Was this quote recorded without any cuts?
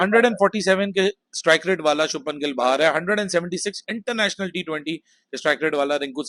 yes; 0 cuts

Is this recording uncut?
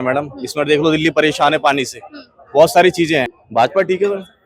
no; 1 cut; at 3.4 s

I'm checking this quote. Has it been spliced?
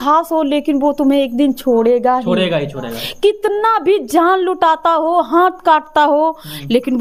no; 0 cuts

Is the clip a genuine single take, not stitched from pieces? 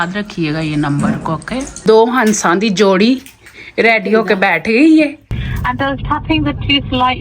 no; 2 cuts; at 1.8 s, 5.3 s

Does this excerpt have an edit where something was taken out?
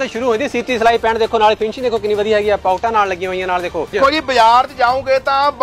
yes; 1 cut; at 4.0 s

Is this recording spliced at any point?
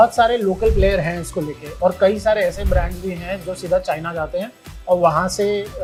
no; 0 cuts

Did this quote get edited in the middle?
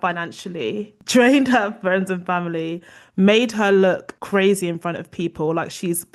no; 0 cuts

